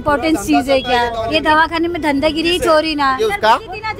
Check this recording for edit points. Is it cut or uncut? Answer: cut